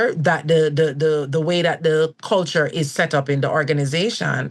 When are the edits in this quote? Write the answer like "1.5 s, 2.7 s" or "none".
none